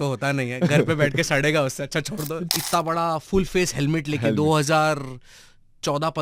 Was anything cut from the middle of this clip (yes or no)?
yes